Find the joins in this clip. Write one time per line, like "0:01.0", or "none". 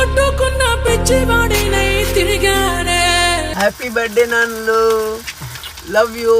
0:03.5